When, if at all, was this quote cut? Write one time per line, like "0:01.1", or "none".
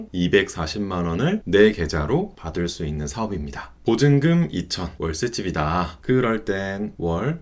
0:03.7